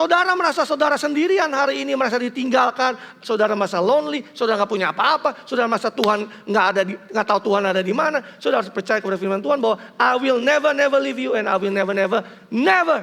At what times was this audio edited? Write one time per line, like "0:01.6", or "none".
none